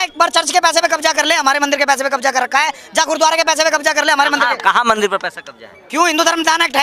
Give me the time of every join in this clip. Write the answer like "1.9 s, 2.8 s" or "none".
none